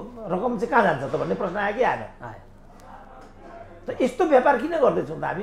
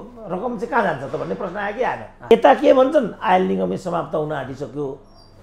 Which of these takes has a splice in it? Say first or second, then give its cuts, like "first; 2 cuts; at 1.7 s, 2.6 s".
second; 1 cut; at 2.3 s